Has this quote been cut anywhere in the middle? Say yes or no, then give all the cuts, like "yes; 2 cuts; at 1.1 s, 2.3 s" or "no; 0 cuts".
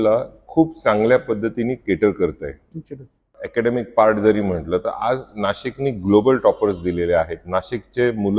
yes; 1 cut; at 3.3 s